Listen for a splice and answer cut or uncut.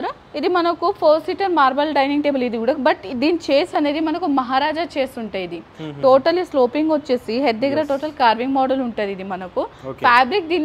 uncut